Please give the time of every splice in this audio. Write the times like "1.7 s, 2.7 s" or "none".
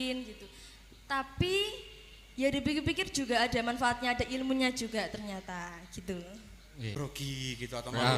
6.9 s